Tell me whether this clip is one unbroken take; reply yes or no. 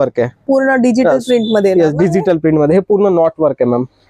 yes